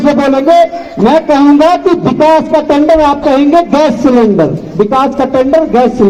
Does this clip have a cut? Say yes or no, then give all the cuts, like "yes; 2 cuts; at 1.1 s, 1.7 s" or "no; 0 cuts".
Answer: no; 0 cuts